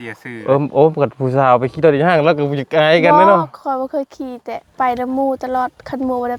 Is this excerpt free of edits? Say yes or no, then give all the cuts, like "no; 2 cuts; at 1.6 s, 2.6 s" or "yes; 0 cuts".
yes; 0 cuts